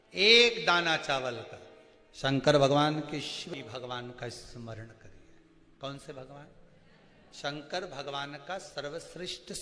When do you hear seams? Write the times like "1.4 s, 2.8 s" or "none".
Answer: 3.5 s